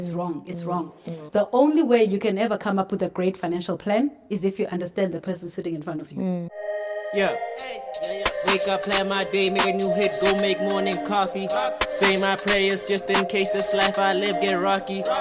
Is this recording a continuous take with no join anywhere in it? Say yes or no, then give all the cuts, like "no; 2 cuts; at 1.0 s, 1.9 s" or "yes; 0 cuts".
no; 2 cuts; at 1.2 s, 6.6 s